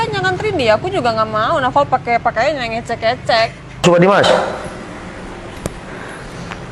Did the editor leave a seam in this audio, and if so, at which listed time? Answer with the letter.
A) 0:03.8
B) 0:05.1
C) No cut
A